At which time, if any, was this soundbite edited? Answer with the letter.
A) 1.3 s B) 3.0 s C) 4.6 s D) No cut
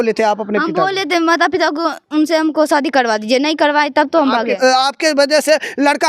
C